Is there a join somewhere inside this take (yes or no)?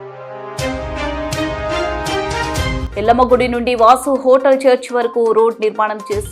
yes